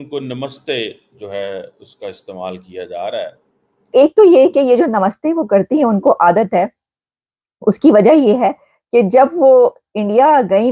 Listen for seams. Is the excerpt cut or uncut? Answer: cut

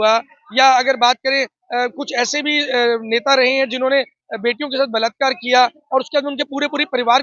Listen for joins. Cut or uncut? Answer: uncut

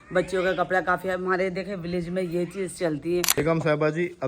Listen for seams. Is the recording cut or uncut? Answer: cut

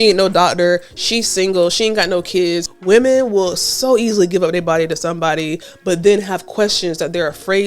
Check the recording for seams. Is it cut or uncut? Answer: cut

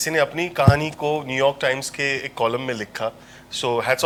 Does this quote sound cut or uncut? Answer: uncut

